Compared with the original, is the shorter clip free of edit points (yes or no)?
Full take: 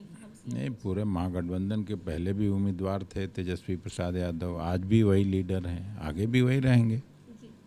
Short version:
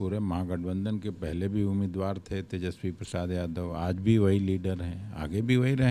yes